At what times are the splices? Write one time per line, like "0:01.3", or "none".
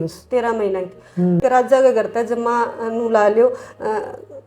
0:01.4

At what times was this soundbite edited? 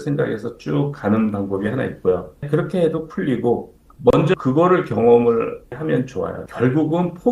0:02.4
0:03.8
0:05.7

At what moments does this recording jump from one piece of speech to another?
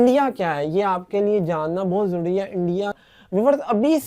0:03.0

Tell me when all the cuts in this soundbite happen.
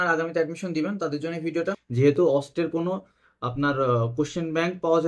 0:01.8

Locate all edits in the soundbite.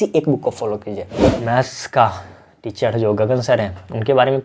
0:01.2

